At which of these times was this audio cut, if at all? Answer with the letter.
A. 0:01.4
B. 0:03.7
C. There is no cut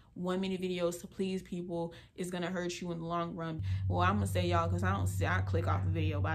B